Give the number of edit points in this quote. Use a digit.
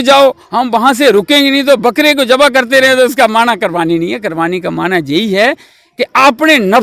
0